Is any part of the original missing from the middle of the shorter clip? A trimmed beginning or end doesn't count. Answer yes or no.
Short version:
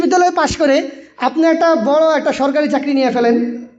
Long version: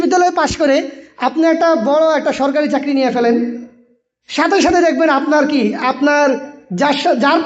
no